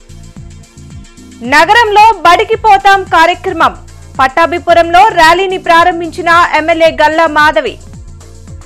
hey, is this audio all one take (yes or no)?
no